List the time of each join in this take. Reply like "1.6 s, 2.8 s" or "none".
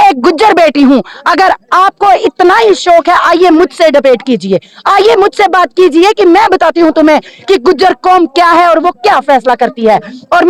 none